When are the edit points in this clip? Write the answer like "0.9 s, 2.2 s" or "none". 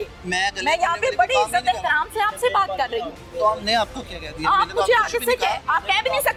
none

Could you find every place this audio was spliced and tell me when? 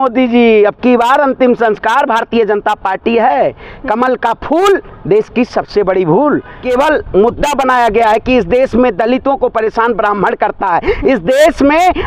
6.6 s

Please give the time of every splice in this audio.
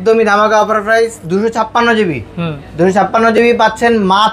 none

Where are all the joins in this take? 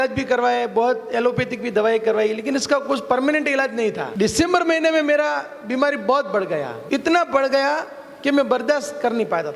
4.1 s, 6.8 s

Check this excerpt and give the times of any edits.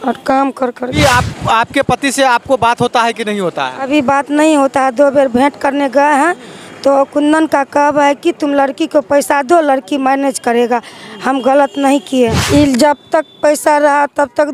1.0 s, 12.4 s

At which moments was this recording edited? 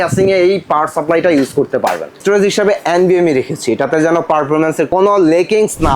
2.2 s, 4.9 s

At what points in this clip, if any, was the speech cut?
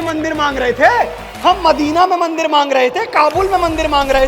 1.2 s

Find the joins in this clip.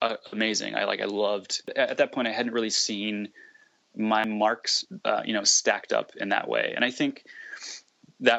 4.2 s

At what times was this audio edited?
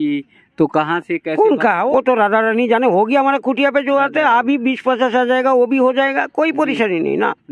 1.9 s

